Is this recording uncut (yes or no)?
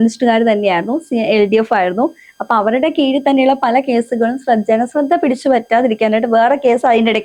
yes